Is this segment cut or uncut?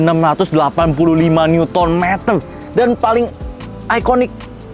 cut